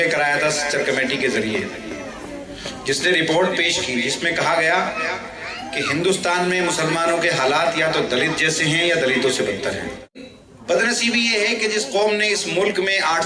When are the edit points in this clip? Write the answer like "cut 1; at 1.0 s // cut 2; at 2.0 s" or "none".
cut 1; at 10.3 s